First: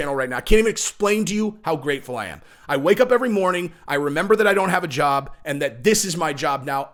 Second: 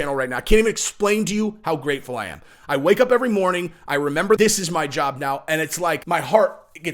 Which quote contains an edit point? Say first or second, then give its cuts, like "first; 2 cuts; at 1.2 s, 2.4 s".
second; 2 cuts; at 4.4 s, 6.0 s